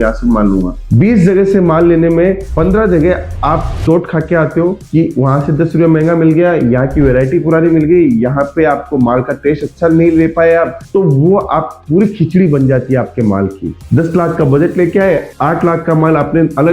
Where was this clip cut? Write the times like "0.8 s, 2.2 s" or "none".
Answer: none

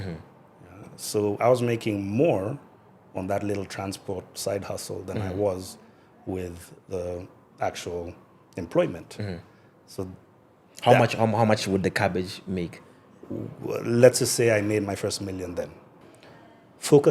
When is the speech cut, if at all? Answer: 16.1 s

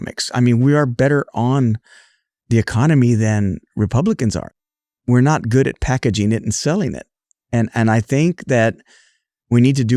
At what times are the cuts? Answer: 4.5 s

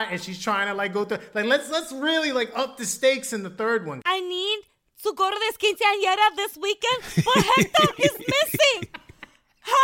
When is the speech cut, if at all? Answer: 4.0 s

